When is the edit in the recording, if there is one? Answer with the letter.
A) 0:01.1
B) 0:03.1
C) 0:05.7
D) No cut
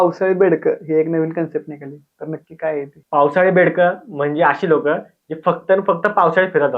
D